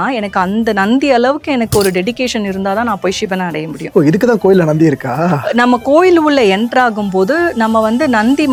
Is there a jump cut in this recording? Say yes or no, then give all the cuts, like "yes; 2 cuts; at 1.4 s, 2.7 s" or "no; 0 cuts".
no; 0 cuts